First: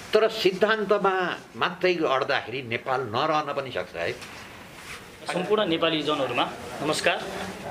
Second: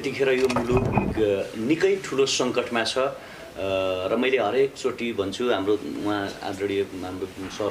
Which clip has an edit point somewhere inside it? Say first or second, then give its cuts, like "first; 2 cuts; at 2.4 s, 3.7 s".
first; 1 cut; at 5.2 s